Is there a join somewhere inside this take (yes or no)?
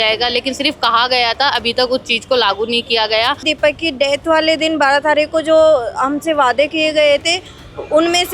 yes